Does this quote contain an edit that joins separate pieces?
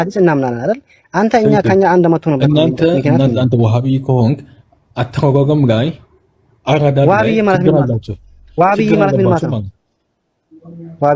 no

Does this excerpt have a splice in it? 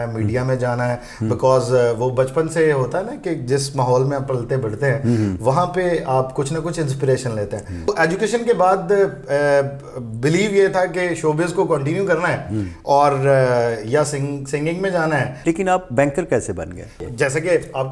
yes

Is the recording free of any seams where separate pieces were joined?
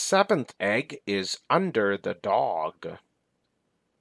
yes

